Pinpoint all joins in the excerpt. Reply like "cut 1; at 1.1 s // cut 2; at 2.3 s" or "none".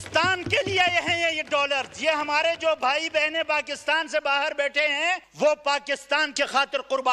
cut 1; at 5.3 s // cut 2; at 6.3 s